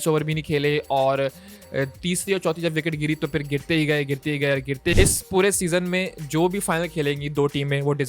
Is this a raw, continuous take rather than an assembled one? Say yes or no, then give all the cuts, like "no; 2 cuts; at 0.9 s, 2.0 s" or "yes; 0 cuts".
no; 1 cut; at 4.9 s